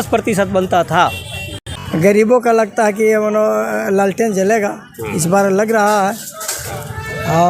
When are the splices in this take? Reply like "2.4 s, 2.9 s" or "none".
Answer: 1.6 s